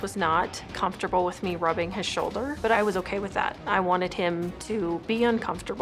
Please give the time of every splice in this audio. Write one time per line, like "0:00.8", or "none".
0:02.7